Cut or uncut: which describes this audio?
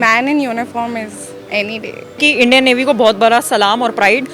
cut